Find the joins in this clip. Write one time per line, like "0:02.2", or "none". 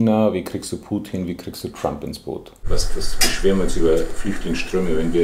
0:02.7